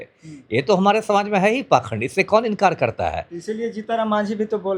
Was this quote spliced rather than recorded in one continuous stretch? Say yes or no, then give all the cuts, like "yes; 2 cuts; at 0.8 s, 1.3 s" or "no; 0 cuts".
no; 0 cuts